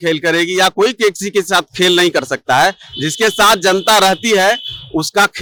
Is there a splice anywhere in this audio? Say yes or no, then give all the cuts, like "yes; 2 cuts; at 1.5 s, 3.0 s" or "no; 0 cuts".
no; 0 cuts